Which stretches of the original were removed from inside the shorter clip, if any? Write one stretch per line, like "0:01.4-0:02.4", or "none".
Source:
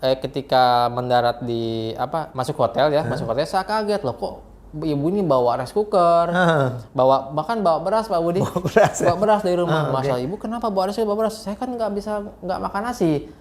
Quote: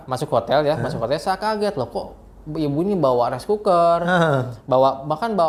none